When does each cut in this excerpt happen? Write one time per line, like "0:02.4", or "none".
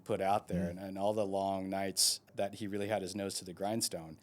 0:02.3